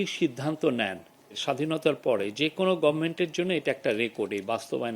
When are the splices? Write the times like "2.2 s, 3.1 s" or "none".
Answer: 1.4 s